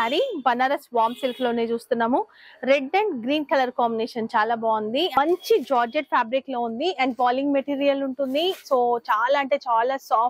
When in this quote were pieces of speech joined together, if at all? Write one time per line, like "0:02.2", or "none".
0:05.2